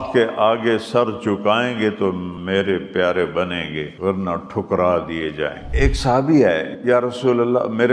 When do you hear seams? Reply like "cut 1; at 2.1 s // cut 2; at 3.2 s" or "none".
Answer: cut 1; at 2.3 s // cut 2; at 4.1 s // cut 3; at 5.6 s // cut 4; at 6.7 s